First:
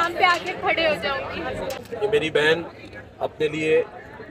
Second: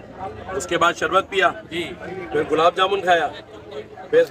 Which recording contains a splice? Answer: first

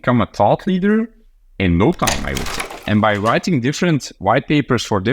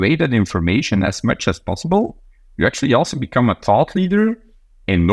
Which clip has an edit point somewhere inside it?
first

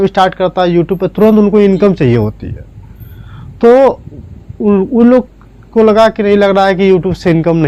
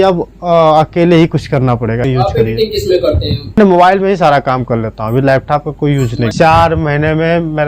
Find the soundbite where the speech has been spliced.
second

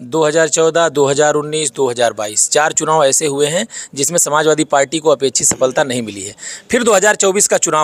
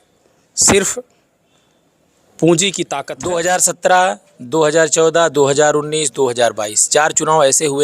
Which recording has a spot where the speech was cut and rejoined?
second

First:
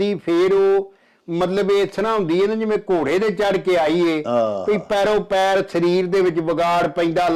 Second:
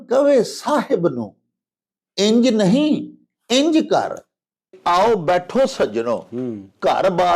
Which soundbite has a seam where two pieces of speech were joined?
second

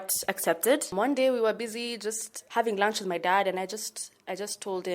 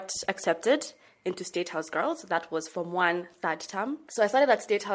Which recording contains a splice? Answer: first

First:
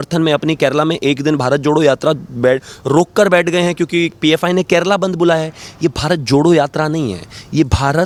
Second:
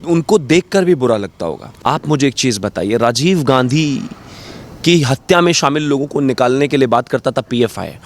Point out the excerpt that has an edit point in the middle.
second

